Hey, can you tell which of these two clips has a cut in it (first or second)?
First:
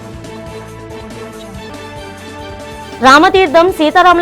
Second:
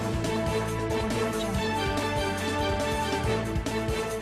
first